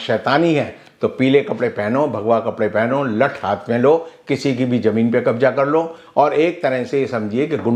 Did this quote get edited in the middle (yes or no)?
no